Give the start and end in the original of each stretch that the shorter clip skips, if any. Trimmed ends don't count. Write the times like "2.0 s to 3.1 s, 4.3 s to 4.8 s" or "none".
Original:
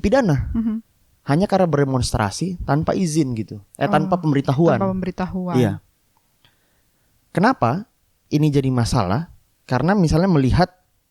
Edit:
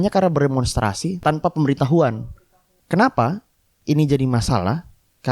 2.6 s to 3.9 s, 4.8 s to 6.6 s